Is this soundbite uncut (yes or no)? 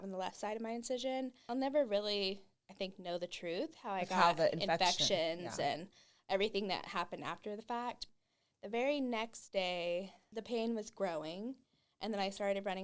no